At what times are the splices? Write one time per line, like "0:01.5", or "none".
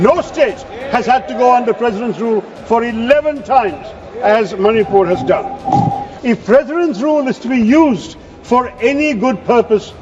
0:06.1